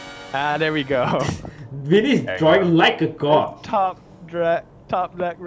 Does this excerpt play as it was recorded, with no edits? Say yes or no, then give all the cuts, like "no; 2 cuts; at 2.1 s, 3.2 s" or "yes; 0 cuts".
yes; 0 cuts